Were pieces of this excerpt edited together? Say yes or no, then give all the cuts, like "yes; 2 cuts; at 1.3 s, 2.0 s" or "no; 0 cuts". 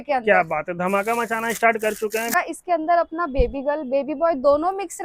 yes; 1 cut; at 2.3 s